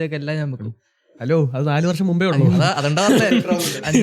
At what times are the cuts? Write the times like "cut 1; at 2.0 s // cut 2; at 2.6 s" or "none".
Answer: cut 1; at 2.4 s